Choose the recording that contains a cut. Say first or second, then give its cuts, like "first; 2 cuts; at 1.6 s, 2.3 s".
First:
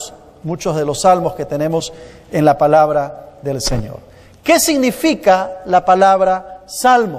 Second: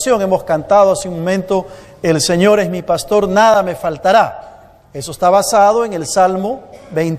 second; 1 cut; at 1.4 s